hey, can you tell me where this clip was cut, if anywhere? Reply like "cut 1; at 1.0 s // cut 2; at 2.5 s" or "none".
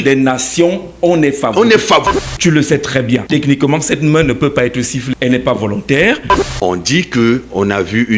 cut 1; at 2.0 s // cut 2; at 3.2 s // cut 3; at 5.1 s // cut 4; at 6.3 s